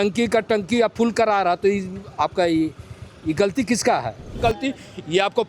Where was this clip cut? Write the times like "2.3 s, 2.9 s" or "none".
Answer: 4.4 s

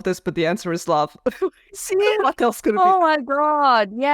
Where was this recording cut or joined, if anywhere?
2.8 s

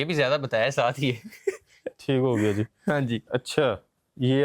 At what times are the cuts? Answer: none

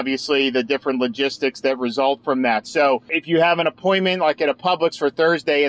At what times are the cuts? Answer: 3.2 s

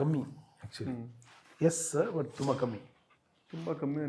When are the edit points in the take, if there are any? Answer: none

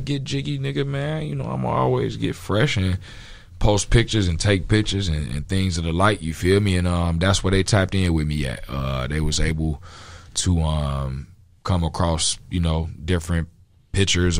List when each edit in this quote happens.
none

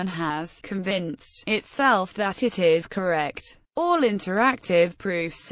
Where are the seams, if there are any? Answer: 2.7 s

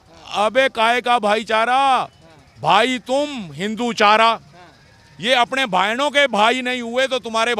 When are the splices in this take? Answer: none

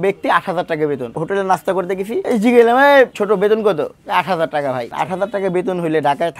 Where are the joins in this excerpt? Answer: 1.1 s, 2.2 s, 3.2 s, 4.9 s

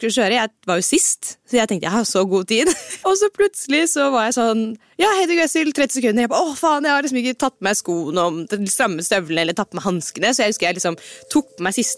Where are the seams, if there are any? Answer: 2.9 s

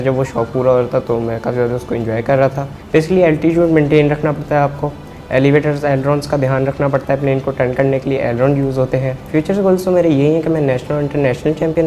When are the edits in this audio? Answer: 2.7 s, 9.2 s

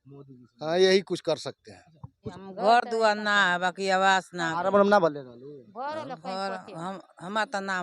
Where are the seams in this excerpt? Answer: 2.3 s

